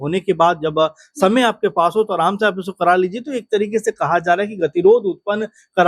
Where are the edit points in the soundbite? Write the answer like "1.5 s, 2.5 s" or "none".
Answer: none